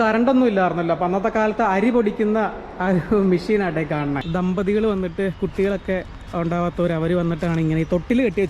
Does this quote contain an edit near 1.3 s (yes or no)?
no